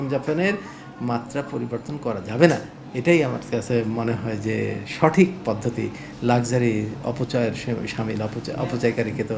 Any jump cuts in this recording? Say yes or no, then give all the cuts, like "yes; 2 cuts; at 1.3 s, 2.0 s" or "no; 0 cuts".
no; 0 cuts